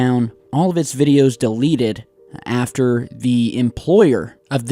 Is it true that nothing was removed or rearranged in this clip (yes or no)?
no